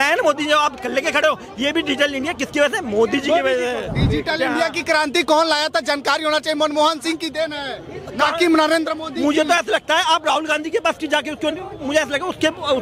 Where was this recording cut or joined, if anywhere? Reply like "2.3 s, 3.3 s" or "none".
none